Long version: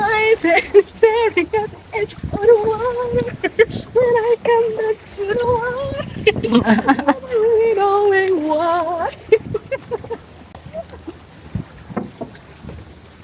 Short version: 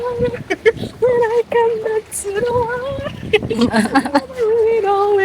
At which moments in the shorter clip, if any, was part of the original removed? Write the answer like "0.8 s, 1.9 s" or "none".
none